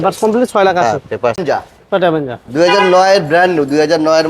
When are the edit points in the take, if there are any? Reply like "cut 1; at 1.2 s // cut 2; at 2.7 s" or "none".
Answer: cut 1; at 1.4 s